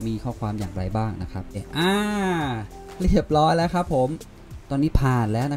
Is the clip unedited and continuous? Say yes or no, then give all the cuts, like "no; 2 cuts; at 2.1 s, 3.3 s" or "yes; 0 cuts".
no; 2 cuts; at 1.6 s, 4.2 s